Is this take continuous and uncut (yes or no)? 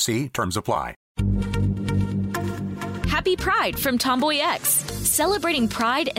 no